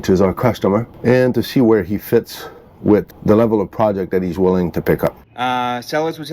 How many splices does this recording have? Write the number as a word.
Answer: three